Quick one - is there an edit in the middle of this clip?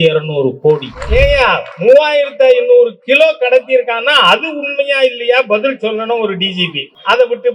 yes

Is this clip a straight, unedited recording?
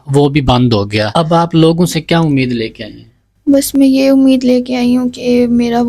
no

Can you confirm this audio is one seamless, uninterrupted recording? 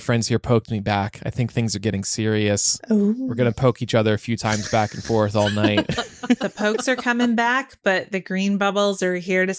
no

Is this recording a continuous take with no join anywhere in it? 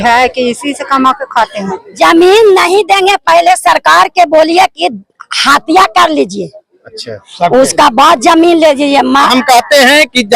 no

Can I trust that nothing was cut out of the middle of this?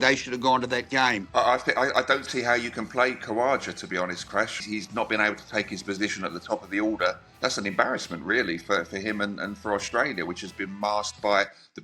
no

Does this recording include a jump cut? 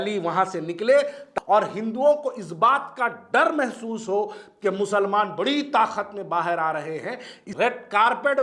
yes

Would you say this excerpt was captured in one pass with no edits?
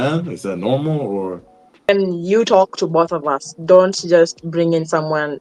no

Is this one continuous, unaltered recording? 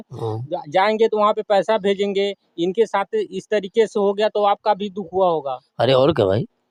yes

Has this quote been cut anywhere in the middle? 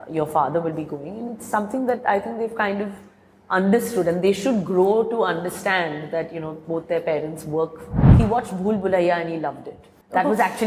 yes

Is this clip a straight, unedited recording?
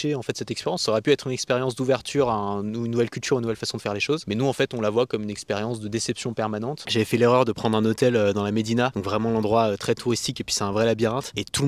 no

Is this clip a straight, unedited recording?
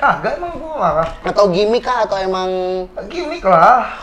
yes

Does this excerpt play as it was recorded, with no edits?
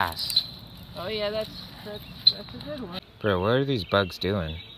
no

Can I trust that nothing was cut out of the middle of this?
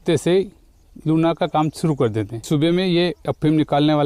no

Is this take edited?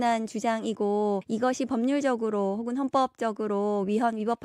yes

